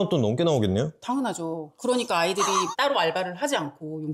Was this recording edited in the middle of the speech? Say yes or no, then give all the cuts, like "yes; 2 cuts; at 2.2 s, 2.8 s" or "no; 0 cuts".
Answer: no; 0 cuts